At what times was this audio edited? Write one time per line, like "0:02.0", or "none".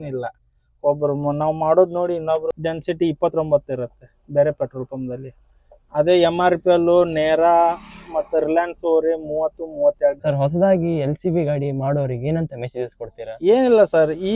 0:02.6
0:10.2